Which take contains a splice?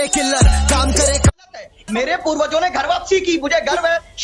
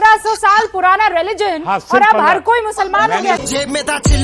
first; 1 cut; at 1.3 s

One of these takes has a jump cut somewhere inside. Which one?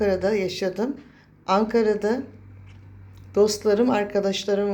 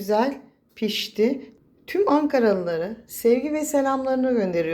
second; 1 cut; at 1.5 s

